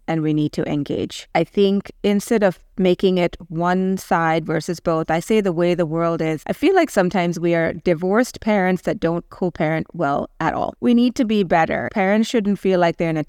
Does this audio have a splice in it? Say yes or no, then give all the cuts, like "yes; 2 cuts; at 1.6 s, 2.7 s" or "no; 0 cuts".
yes; 4 cuts; at 1.2 s, 6.4 s, 10.7 s, 11.9 s